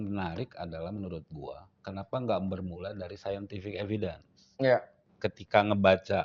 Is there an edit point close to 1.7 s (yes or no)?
no